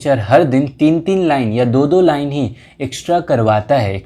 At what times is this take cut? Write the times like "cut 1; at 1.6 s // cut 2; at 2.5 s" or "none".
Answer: none